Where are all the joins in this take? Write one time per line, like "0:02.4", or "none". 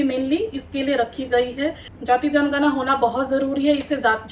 0:01.9